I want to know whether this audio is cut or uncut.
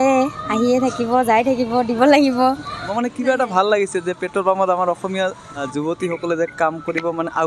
cut